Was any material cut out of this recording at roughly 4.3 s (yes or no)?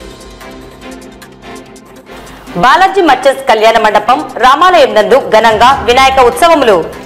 no